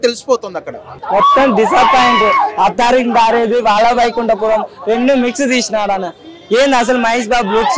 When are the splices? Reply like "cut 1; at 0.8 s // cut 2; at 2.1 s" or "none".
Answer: cut 1; at 0.9 s